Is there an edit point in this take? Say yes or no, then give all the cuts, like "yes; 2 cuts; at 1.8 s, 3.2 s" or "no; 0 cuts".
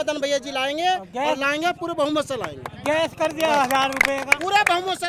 no; 0 cuts